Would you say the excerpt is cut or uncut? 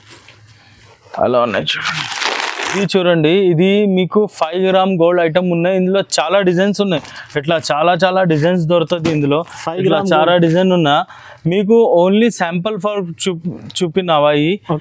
cut